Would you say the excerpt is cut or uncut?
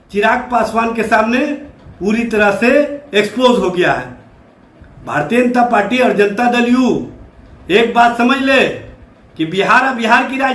uncut